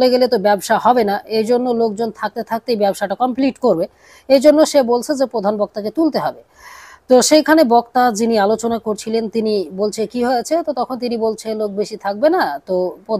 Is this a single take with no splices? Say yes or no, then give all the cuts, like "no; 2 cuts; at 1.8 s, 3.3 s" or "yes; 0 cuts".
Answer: yes; 0 cuts